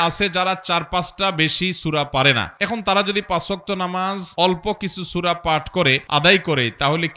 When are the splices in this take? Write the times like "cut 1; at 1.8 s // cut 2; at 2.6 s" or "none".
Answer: cut 1; at 2.5 s // cut 2; at 4.2 s // cut 3; at 6.0 s